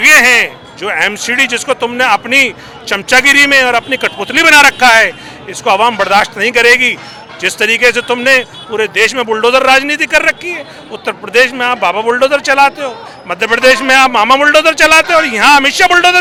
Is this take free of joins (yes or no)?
yes